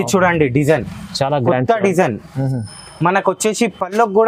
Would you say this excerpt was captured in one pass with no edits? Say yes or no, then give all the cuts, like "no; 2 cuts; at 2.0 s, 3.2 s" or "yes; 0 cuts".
yes; 0 cuts